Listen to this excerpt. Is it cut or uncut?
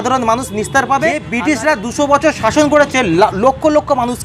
cut